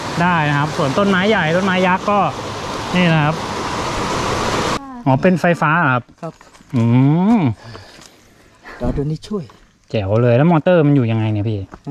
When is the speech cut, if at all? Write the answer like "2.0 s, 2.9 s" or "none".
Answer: 4.8 s